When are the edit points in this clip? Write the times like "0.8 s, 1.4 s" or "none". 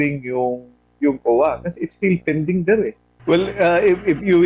3.1 s